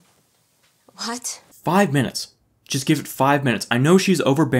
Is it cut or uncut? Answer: cut